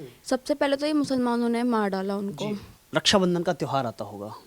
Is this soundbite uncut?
no; 1 cut; at 2.8 s

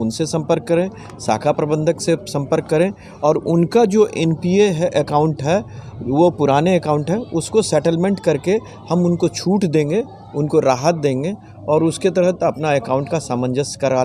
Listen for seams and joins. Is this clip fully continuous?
yes; 0 cuts

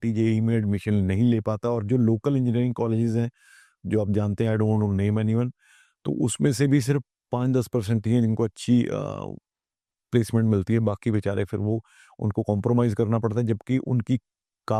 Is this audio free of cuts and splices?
yes; 0 cuts

